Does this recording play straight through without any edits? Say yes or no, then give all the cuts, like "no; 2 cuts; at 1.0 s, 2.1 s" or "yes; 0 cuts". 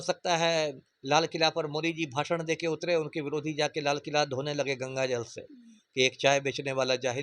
yes; 0 cuts